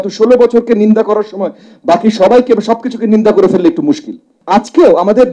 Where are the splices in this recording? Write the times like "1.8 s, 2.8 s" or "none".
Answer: 4.3 s